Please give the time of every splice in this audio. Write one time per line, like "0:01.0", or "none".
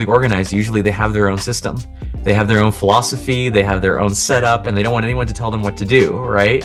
none